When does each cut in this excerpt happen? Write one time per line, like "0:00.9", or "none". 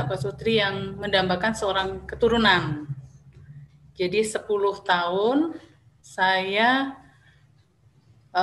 none